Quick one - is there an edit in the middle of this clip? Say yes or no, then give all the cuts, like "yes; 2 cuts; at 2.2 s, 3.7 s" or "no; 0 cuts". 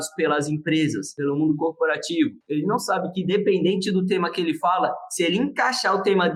no; 0 cuts